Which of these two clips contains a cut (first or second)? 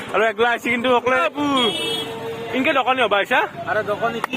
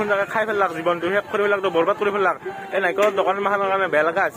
first